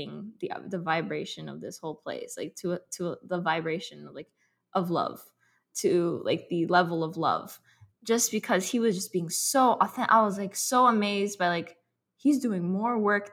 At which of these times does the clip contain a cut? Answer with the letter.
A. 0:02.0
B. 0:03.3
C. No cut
C